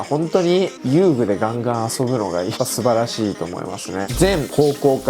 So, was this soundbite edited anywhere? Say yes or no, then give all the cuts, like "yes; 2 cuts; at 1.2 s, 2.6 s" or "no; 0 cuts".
yes; 2 cuts; at 2.5 s, 4.1 s